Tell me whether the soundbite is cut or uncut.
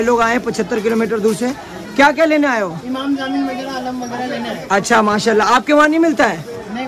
uncut